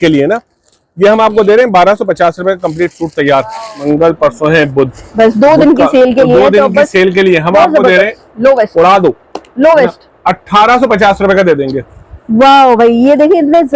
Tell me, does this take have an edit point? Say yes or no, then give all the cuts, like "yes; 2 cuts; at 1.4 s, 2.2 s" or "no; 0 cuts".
yes; 1 cut; at 3.8 s